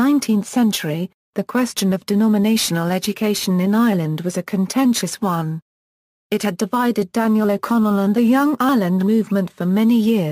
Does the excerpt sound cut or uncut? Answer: cut